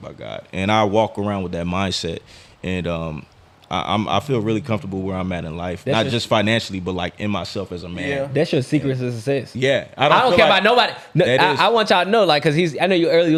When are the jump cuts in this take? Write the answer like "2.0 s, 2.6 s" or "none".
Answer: none